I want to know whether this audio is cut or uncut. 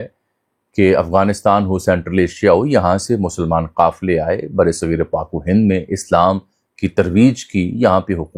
uncut